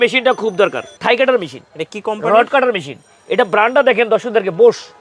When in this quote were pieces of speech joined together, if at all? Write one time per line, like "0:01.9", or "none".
0:01.0